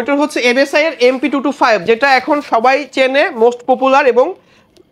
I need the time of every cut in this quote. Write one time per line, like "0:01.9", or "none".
none

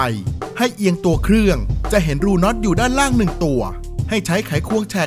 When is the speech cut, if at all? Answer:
none

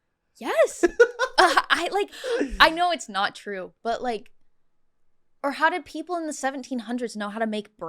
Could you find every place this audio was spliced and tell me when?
0:02.2

